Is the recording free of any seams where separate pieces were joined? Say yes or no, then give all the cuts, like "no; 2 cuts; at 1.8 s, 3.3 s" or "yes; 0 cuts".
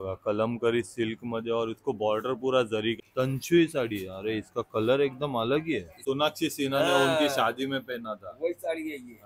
no; 2 cuts; at 3.0 s, 5.9 s